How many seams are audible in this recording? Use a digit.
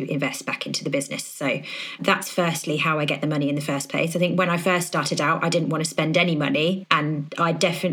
1